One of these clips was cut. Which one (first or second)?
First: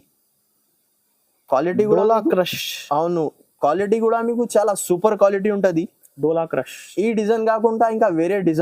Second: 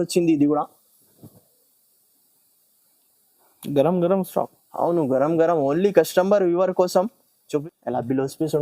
second